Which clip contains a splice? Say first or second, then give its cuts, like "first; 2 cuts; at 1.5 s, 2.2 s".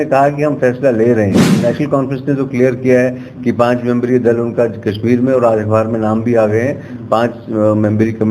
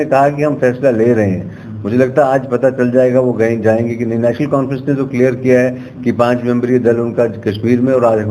first; 1 cut; at 1.5 s